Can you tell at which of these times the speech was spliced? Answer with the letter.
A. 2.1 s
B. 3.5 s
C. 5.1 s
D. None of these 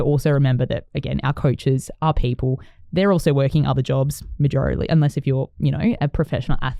D